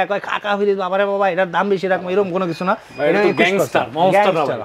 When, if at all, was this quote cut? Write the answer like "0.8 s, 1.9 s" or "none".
none